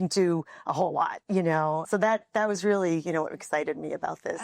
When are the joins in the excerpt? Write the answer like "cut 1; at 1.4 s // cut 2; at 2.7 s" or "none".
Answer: cut 1; at 1.8 s

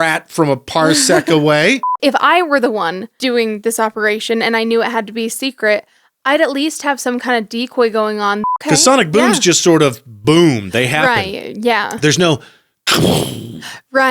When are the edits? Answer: cut 1; at 1.9 s // cut 2; at 3.1 s // cut 3; at 8.6 s

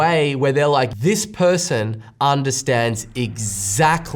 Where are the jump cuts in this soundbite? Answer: cut 1; at 0.9 s

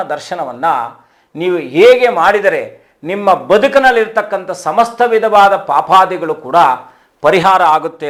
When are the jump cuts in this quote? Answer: none

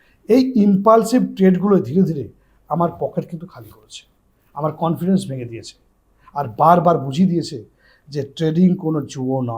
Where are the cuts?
none

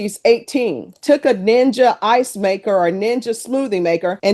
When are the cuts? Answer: cut 1; at 1.0 s

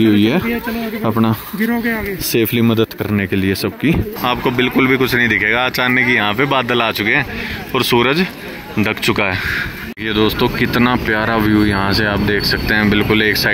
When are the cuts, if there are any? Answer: cut 1; at 4.1 s // cut 2; at 9.9 s

